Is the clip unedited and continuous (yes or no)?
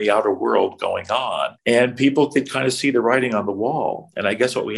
no